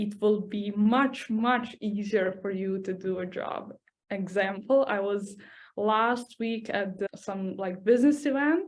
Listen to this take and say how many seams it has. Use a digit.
1